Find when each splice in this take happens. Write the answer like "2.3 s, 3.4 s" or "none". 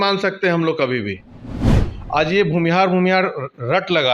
1.8 s

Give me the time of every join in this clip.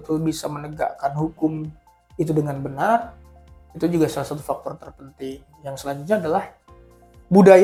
none

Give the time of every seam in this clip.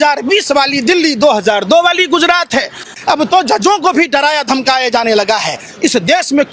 2.9 s

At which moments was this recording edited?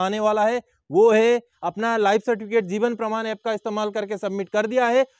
1.6 s

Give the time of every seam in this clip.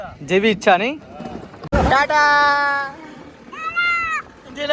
1.5 s

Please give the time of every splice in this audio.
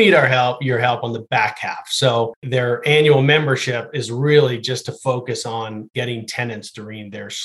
2.4 s, 5.9 s

